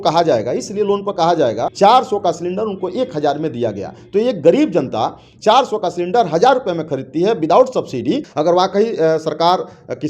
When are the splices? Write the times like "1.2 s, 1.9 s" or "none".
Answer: 1.7 s, 8.3 s